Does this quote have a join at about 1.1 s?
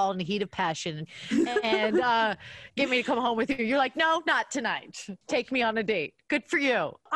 yes; 1 cut; at 1.1 s

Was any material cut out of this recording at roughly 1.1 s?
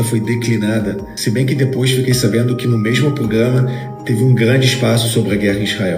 yes; 1 cut; at 1.1 s

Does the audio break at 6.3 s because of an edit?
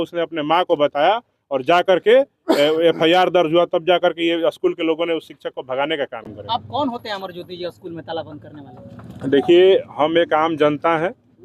yes; 1 cut; at 6.3 s

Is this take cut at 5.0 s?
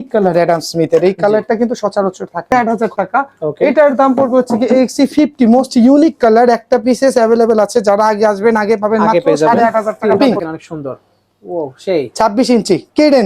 no; 2 cuts; at 2.5 s, 10.1 s

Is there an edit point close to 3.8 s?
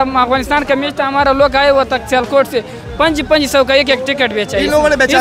no; 0 cuts

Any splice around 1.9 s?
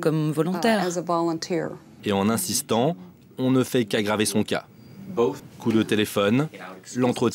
yes; 2 cuts; at 1.9 s, 5.5 s

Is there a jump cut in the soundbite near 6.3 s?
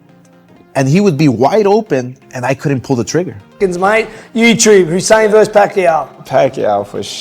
no; 1 cut; at 3.6 s

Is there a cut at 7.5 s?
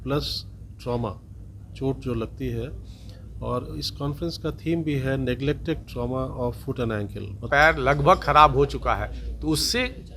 yes; 1 cut; at 7.5 s

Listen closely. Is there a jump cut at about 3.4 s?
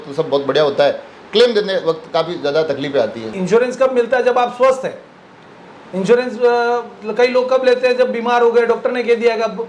yes; 1 cut; at 3.4 s

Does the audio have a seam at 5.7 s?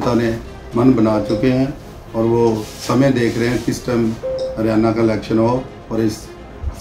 no; 0 cuts

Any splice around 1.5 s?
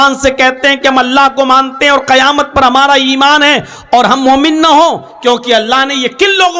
no; 0 cuts

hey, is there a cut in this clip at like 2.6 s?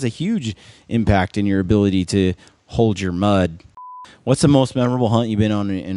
no; 1 cut; at 3.9 s

